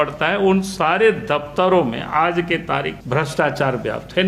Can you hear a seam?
yes; 1 cut; at 3.0 s

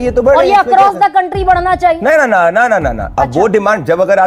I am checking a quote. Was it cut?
no; 0 cuts

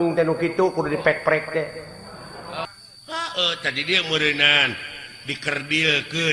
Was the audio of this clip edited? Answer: yes; 1 cut; at 2.7 s

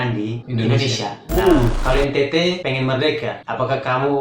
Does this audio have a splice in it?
yes; 1 cut; at 1.8 s

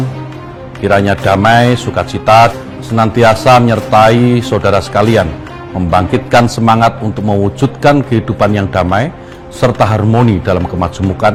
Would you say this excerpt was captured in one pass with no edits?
yes; 0 cuts

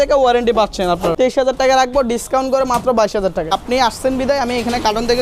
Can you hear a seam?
yes; 2 cuts; at 1.1 s, 3.5 s

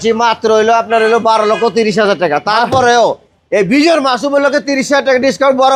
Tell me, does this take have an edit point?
no; 0 cuts

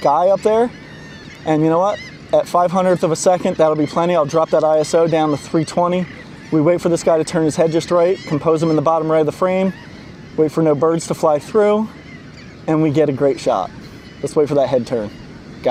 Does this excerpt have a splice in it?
no; 0 cuts

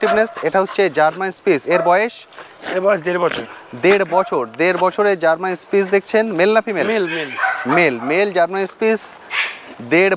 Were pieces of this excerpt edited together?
no; 0 cuts

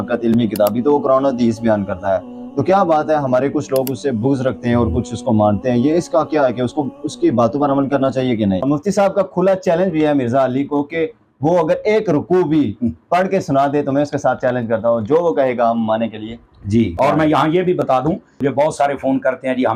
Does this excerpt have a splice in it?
no; 0 cuts

